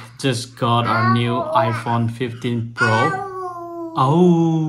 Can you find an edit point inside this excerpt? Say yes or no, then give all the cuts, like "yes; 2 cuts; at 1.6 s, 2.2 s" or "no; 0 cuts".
no; 0 cuts